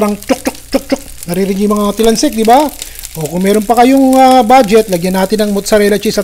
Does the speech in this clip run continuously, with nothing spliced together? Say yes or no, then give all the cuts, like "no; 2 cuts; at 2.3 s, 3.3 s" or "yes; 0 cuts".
yes; 0 cuts